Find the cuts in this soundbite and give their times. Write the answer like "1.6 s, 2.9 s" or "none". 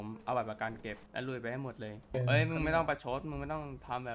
1.0 s, 2.1 s